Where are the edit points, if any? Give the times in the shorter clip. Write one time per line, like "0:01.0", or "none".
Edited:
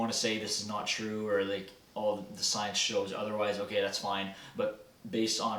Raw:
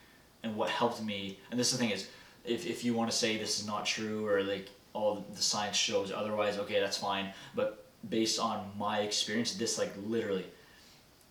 none